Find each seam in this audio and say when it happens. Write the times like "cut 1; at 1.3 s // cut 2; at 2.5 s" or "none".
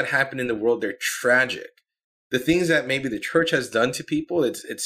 none